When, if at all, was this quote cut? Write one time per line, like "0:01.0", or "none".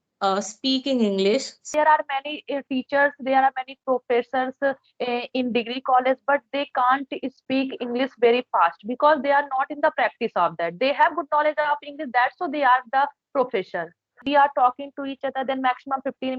0:01.7
0:14.2